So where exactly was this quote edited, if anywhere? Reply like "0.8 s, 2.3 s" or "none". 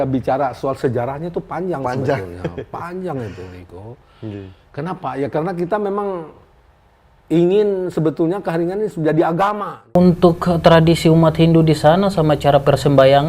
9.7 s